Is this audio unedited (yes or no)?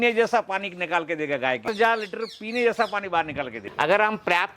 no